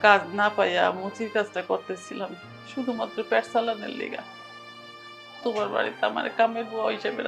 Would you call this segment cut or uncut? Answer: uncut